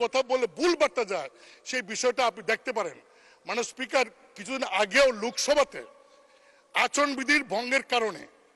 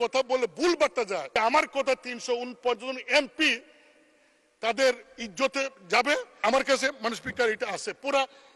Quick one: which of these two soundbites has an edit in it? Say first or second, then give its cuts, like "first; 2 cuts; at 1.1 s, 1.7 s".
second; 2 cuts; at 1.3 s, 6.4 s